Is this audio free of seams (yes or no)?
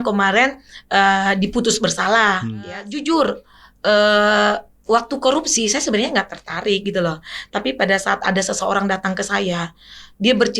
no